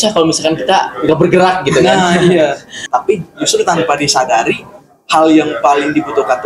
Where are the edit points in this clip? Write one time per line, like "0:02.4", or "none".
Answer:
0:02.8